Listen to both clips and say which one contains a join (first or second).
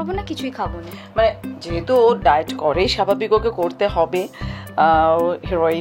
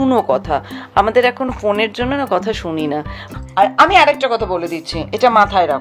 second